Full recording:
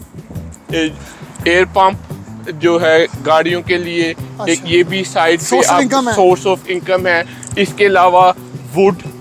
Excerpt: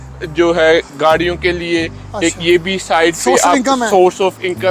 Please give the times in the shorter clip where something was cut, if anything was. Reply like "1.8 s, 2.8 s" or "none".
none